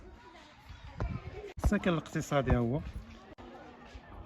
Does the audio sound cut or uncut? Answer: cut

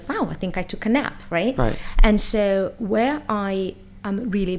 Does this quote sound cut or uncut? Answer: uncut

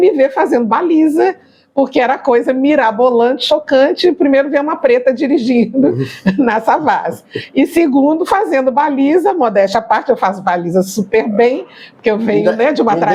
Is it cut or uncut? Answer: uncut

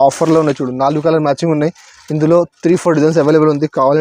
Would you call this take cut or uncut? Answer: uncut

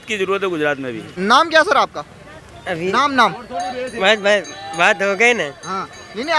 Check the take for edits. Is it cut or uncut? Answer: cut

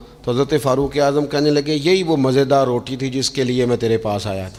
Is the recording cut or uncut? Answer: uncut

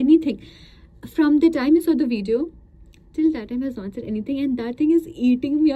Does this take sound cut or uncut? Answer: uncut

